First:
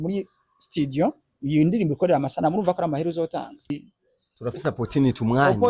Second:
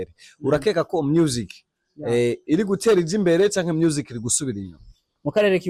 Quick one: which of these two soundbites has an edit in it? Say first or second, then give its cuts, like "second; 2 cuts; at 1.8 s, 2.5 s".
first; 1 cut; at 3.7 s